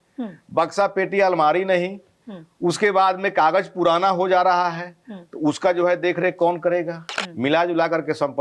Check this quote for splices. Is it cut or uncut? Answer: cut